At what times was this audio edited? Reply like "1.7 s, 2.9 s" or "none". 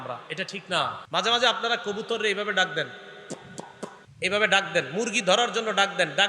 1.0 s, 4.0 s